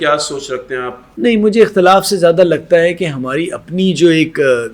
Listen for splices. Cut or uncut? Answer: cut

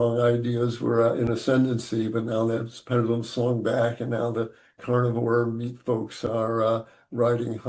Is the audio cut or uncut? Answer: uncut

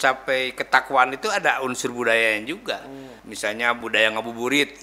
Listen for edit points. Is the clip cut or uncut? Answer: cut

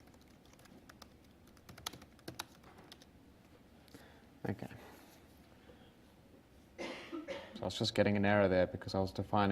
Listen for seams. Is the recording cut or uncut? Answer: cut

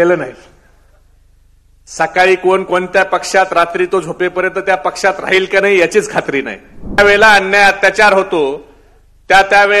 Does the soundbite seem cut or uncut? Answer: cut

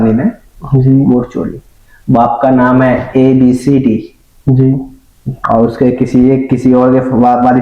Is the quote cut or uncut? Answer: uncut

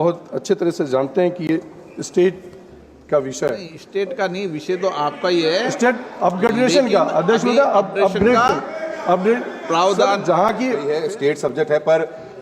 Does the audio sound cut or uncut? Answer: cut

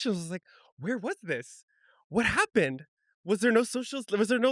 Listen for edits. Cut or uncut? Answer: uncut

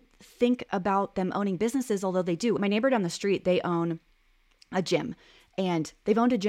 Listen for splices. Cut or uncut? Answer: cut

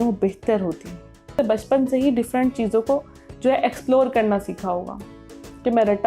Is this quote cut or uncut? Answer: cut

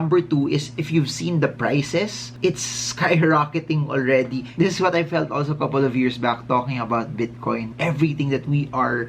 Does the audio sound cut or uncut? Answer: cut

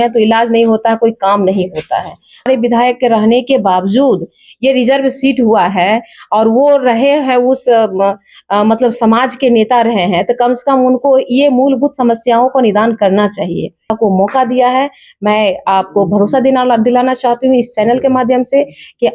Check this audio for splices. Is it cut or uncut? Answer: cut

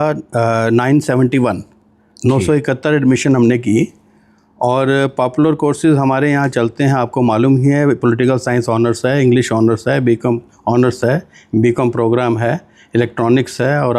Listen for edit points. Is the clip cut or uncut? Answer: uncut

